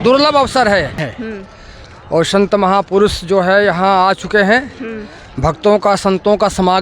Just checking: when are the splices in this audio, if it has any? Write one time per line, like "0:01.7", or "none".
0:01.1